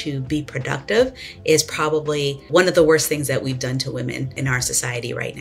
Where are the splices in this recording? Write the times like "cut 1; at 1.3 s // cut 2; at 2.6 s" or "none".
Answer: cut 1; at 2.4 s // cut 2; at 4.4 s